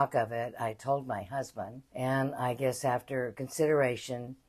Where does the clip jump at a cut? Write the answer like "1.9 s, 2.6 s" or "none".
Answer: 1.8 s

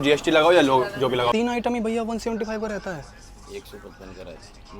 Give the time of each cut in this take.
1.3 s

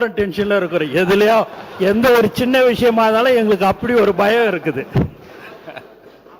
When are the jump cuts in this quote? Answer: none

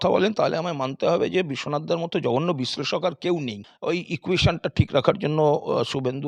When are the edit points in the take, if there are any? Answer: 3.7 s

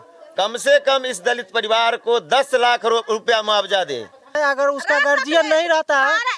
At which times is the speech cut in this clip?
4.4 s

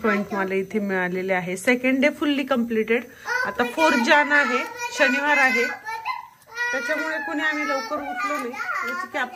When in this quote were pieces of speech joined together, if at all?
none

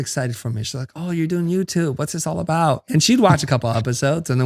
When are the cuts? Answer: 2.8 s

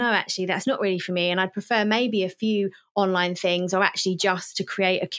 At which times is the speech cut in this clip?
none

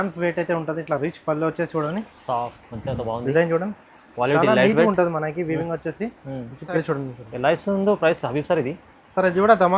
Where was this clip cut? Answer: 6.8 s

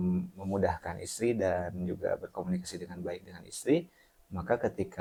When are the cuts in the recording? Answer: none

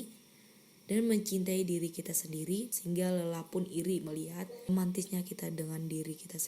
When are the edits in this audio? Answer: 2.7 s, 4.7 s

